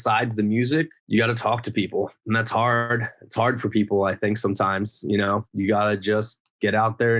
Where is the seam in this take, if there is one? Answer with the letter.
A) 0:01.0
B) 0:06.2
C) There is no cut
A